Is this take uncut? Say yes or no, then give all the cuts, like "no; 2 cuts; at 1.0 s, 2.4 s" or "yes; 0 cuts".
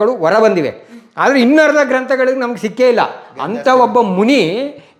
yes; 0 cuts